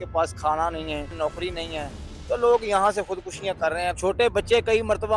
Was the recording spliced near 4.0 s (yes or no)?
yes